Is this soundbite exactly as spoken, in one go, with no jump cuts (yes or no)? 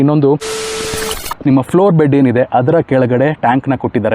no